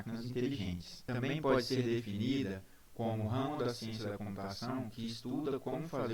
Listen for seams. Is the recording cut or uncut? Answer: cut